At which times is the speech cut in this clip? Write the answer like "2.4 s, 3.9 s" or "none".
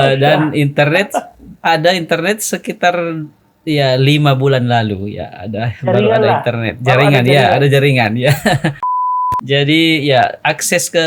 8.9 s

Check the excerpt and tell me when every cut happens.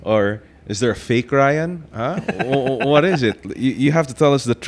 none

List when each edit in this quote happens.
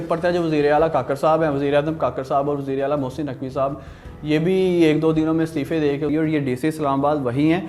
6.1 s

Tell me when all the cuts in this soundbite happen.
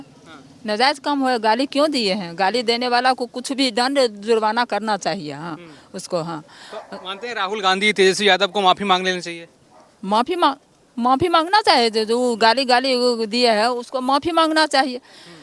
none

